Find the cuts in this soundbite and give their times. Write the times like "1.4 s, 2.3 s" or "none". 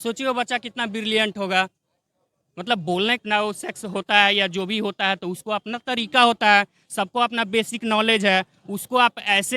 3.7 s